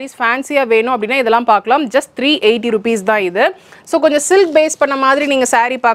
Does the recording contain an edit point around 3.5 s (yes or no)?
no